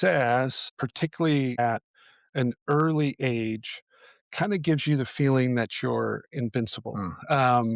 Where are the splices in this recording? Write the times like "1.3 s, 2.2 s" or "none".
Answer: none